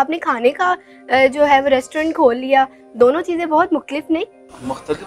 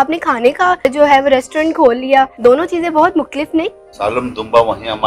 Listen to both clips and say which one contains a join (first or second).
second